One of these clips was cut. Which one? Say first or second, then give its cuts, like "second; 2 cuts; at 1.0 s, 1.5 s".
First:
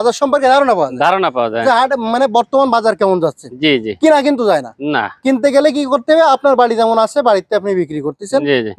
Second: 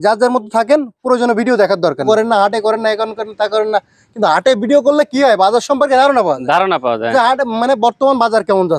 second; 1 cut; at 2.1 s